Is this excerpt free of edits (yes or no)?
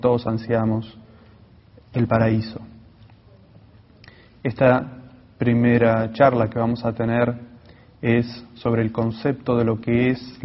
no